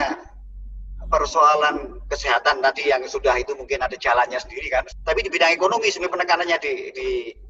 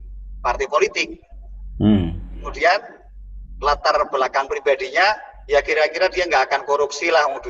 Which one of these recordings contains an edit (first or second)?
first